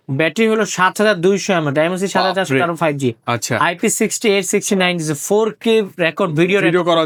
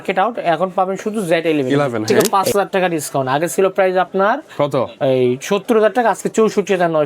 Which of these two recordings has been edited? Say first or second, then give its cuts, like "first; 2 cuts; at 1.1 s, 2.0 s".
second; 1 cut; at 2.0 s